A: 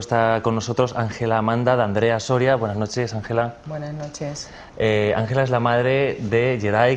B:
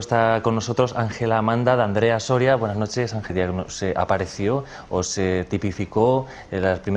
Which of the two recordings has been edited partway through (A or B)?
A